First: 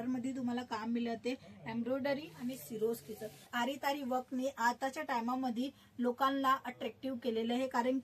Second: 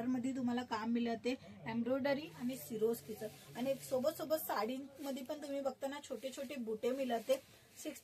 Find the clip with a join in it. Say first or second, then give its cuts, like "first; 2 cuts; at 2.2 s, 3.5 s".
first; 1 cut; at 3.5 s